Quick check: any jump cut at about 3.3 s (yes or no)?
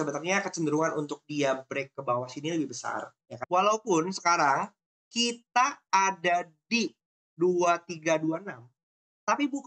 yes